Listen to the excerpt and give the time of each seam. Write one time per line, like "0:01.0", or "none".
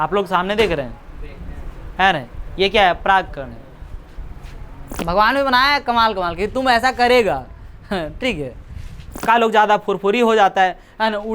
0:05.0
0:09.2